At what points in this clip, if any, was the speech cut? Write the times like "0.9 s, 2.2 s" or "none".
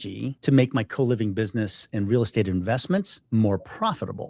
none